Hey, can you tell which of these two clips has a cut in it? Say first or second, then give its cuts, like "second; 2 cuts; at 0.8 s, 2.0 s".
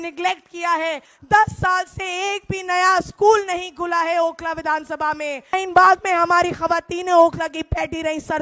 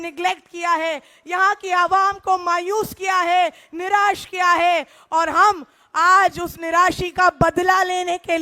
first; 2 cuts; at 1.1 s, 5.6 s